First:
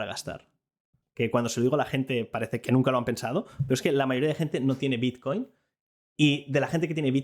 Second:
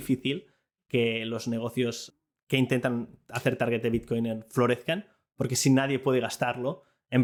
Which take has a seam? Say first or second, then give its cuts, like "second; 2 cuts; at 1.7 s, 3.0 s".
first; 2 cuts; at 1.0 s, 2.6 s